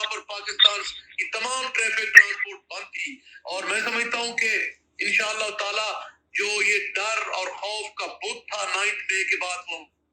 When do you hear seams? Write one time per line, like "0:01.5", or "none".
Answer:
none